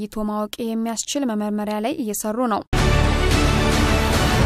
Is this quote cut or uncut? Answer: cut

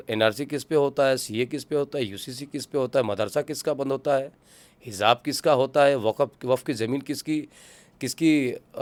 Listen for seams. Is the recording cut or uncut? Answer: uncut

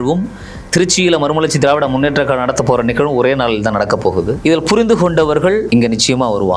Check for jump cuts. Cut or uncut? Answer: cut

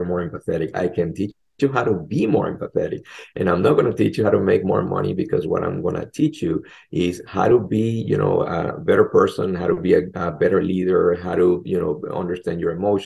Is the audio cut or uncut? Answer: uncut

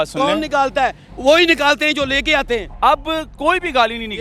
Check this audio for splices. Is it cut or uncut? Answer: cut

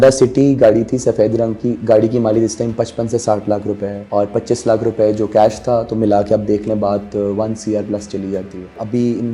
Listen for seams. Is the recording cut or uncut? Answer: uncut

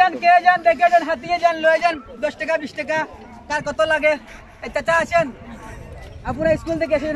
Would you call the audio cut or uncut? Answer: uncut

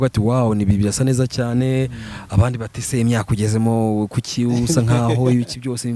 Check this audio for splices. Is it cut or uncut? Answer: uncut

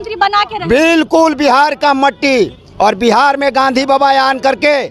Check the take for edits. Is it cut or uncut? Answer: uncut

